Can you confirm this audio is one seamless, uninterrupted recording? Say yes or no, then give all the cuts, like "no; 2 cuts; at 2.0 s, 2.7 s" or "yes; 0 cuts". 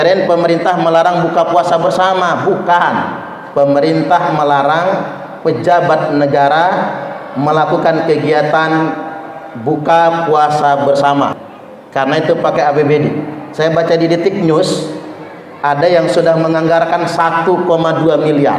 no; 1 cut; at 11.4 s